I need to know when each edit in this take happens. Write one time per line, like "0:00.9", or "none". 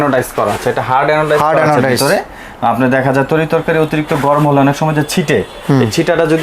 none